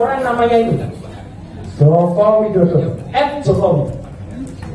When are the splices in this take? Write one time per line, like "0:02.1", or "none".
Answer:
none